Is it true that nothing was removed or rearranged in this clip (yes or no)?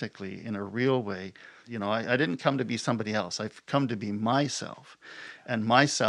no